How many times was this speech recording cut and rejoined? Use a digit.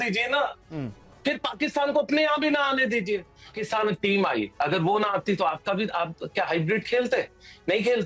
1